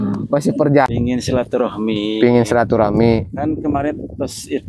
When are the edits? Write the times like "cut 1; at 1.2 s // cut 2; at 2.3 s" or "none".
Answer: cut 1; at 0.9 s